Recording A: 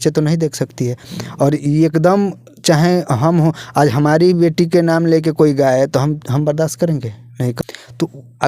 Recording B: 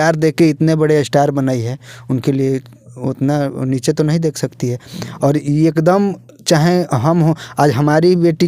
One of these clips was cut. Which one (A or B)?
A